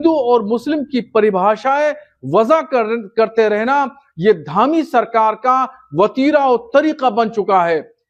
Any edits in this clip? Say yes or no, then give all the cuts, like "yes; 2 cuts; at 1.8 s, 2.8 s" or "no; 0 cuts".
no; 0 cuts